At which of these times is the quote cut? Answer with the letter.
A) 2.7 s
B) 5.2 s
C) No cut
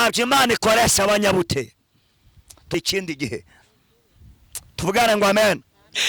A